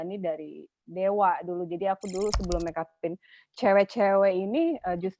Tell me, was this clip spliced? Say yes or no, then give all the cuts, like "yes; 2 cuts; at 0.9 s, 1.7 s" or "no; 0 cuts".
no; 0 cuts